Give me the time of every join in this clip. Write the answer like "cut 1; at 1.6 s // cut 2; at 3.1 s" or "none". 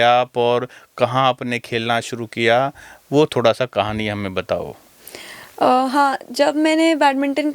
none